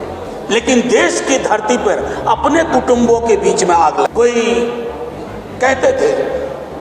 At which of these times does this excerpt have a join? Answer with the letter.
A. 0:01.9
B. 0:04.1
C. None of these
B